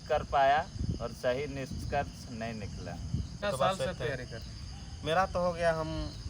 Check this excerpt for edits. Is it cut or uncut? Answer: cut